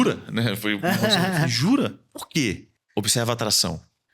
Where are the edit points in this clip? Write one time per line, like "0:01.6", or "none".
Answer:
0:02.7